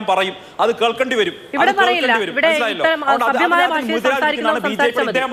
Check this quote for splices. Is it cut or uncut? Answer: uncut